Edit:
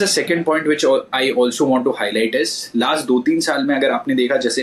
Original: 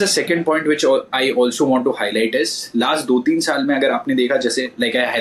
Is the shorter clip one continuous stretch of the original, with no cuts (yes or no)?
yes